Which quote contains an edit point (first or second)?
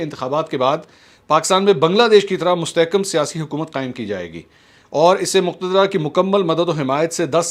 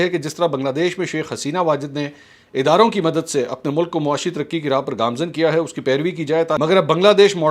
second